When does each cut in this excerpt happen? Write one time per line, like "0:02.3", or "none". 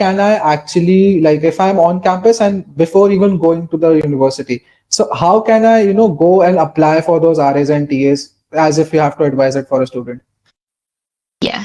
none